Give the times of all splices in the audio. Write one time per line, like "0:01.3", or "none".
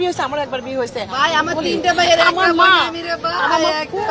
0:01.1